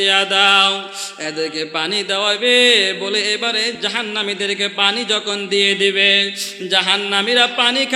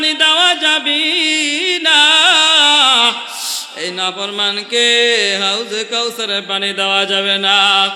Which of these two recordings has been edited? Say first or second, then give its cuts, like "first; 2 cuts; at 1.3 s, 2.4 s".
first; 1 cut; at 3.8 s